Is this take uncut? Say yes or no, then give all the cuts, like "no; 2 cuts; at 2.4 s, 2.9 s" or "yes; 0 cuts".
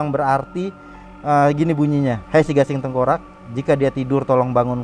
no; 1 cut; at 2.2 s